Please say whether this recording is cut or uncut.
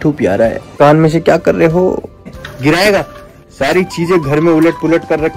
cut